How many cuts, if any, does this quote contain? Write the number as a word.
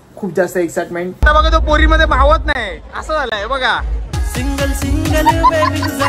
one